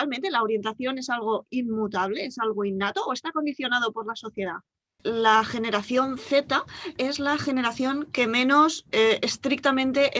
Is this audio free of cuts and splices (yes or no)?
no